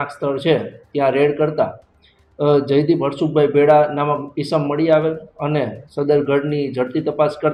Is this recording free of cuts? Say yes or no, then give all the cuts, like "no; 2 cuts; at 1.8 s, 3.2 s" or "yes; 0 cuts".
yes; 0 cuts